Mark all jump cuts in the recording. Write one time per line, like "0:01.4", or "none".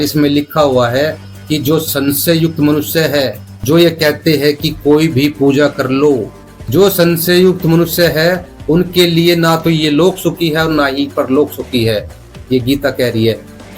none

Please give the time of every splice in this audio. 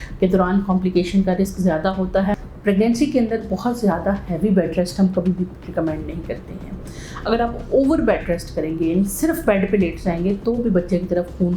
0:02.4

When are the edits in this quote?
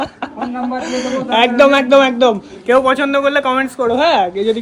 none

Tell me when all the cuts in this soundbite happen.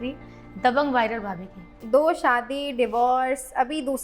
0:01.7

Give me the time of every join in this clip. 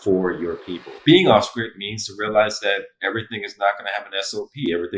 0:01.0

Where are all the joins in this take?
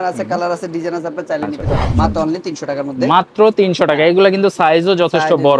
0:01.9

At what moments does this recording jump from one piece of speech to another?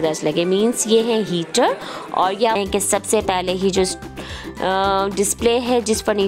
0:02.6

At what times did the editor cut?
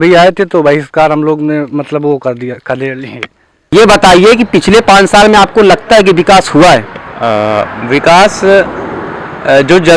0:03.7

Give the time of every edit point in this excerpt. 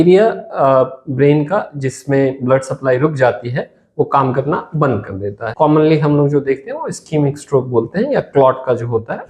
0:05.4

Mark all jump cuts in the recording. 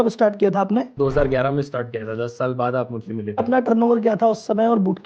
0:00.9
0:03.4

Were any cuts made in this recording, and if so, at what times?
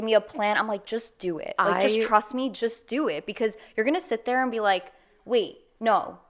none

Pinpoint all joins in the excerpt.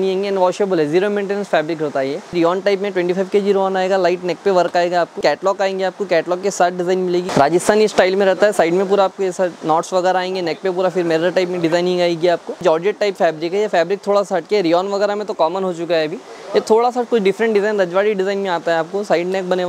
0:02.3
0:05.1
0:07.3
0:12.6

